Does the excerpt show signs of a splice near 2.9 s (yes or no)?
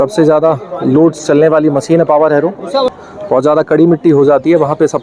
yes